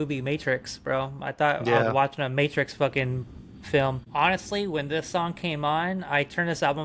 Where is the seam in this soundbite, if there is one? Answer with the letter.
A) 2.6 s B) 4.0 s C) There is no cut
B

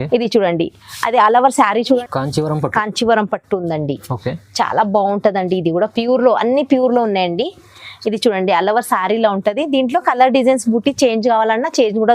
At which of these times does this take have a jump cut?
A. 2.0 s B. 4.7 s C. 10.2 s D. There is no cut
A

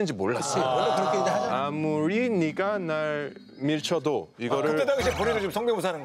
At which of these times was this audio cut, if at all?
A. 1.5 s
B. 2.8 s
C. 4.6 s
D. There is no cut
A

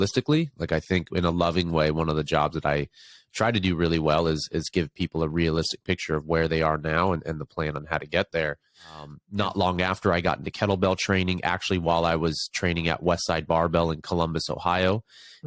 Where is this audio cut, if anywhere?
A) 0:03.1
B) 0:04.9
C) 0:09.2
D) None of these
C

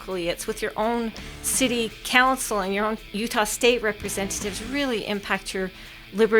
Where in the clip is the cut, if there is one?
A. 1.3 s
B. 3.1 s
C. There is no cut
B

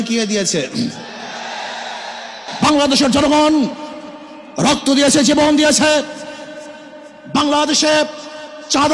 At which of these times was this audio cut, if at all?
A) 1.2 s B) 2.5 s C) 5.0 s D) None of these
B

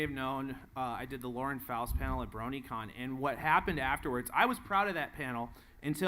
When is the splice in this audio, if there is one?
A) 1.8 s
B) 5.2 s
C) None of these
B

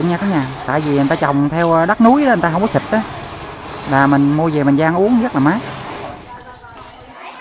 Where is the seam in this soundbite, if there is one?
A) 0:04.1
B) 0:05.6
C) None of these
B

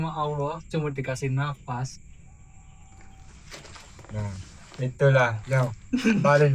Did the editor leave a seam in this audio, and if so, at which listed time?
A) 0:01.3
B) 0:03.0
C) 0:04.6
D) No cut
D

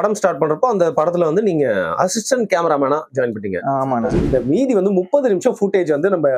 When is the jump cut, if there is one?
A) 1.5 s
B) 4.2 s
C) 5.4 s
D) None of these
B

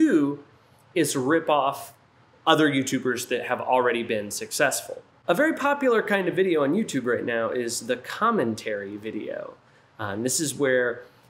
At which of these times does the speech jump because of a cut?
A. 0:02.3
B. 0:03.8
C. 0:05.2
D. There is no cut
C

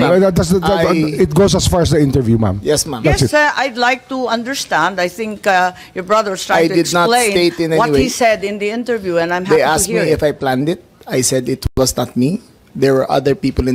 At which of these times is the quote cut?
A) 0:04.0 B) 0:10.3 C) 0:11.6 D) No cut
D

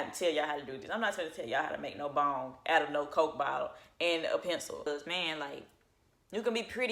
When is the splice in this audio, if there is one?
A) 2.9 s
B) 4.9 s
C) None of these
B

